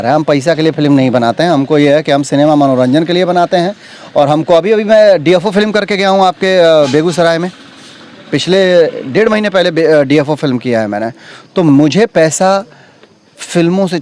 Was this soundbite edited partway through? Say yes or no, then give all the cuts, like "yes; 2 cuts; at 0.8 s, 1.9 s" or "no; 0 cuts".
no; 0 cuts